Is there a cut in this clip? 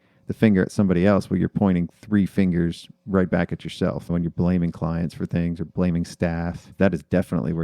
yes; 1 cut; at 4.0 s

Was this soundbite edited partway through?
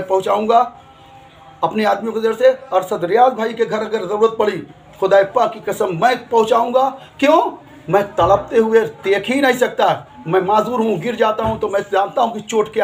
no; 0 cuts

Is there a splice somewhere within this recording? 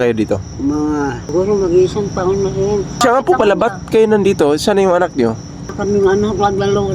yes; 3 cuts; at 1.3 s, 3.0 s, 5.7 s

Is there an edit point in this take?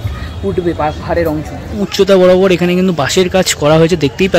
yes; 1 cut; at 1.9 s

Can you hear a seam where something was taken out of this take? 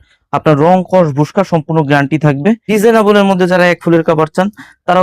yes; 1 cut; at 2.7 s

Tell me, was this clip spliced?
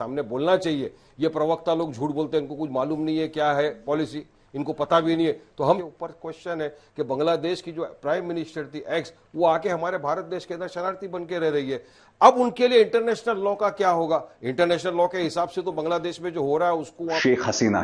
no; 0 cuts

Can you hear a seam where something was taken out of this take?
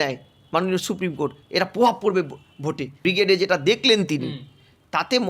yes; 1 cut; at 2.9 s

